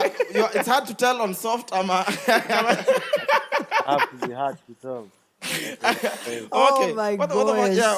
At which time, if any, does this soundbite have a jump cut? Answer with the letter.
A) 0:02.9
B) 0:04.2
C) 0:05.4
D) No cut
D